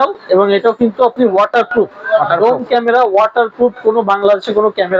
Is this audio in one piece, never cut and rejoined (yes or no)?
yes